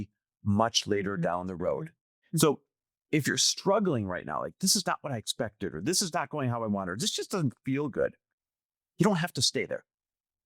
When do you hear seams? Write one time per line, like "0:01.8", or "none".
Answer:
0:02.0